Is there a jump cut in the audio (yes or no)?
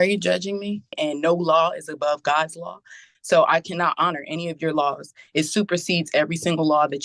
yes